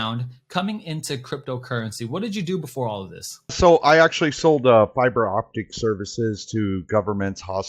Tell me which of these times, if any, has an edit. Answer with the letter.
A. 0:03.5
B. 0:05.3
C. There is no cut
A